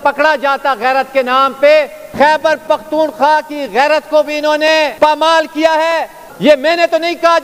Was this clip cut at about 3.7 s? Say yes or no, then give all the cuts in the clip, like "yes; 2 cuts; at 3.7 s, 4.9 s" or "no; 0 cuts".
no; 3 cuts; at 2.0 s, 4.9 s, 6.2 s